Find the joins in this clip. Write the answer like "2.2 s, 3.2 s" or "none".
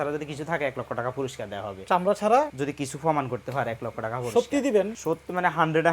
2.5 s, 5.0 s